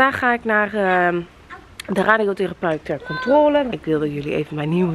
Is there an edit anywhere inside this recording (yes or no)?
yes